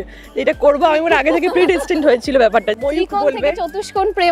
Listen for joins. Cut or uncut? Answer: cut